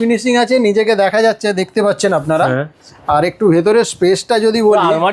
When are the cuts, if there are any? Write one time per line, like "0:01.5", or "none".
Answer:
none